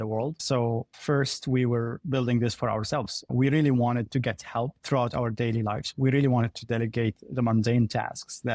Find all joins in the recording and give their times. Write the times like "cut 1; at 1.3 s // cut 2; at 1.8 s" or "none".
none